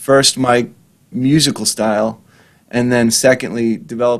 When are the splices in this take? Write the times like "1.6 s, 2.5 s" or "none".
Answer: none